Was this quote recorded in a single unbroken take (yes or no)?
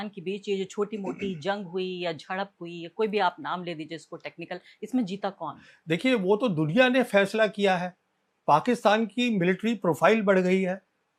yes